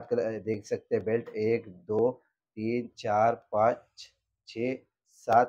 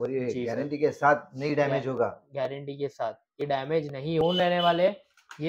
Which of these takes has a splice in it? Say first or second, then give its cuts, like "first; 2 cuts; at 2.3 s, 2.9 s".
second; 1 cut; at 4.2 s